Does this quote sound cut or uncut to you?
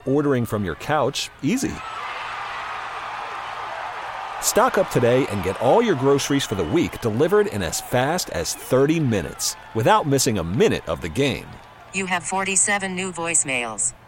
uncut